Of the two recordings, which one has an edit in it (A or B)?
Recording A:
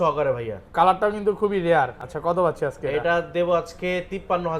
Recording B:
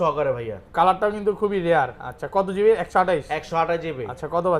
A